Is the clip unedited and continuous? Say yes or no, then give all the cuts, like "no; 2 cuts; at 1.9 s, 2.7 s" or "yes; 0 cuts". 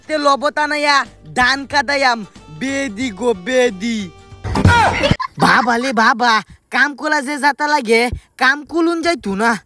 no; 1 cut; at 5.3 s